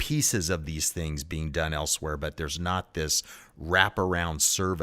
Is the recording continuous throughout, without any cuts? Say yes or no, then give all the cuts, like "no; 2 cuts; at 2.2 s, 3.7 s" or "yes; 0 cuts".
yes; 0 cuts